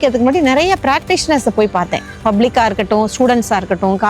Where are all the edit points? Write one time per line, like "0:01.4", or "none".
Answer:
0:02.1

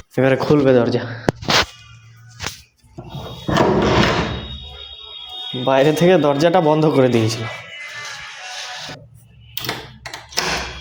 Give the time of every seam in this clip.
none

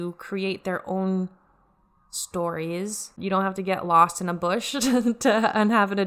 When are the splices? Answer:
0:03.2

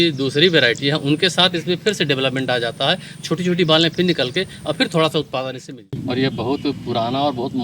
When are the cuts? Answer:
0:06.0

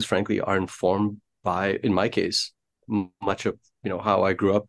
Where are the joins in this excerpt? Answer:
none

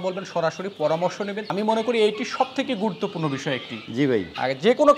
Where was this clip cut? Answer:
0:01.5

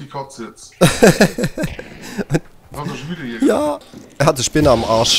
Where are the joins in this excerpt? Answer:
0:04.0

